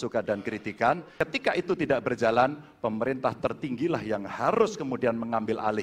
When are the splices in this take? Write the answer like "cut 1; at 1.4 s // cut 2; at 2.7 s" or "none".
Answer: cut 1; at 1.1 s